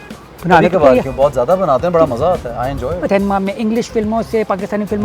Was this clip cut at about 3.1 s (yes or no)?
yes